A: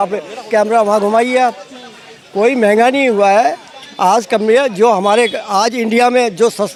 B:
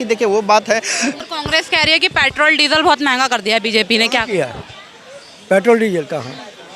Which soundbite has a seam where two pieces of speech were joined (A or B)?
B